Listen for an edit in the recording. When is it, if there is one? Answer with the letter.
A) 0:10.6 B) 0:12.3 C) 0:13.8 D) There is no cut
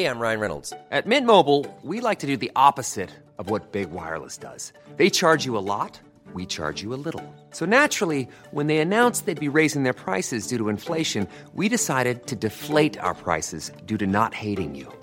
D